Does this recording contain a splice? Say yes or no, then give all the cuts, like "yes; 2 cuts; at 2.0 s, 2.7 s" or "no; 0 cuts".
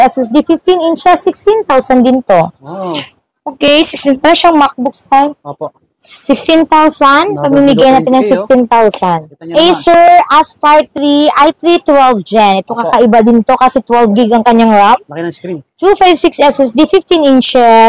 yes; 1 cut; at 9.3 s